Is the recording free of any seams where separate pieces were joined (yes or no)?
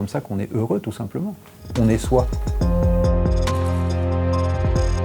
no